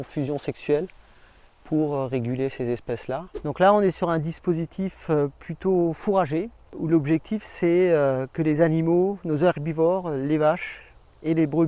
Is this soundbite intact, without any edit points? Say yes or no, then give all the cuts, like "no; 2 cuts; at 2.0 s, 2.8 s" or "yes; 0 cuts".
no; 2 cuts; at 3.3 s, 6.7 s